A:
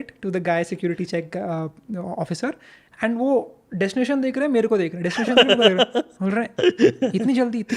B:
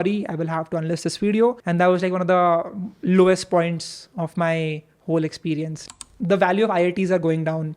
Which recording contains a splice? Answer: B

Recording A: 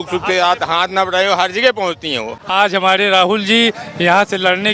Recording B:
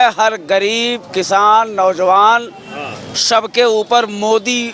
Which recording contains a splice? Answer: A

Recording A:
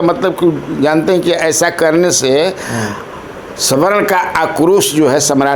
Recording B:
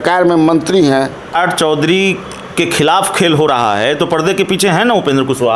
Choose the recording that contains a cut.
B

